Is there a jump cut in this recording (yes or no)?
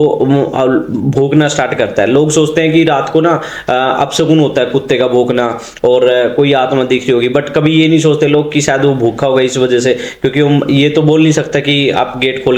no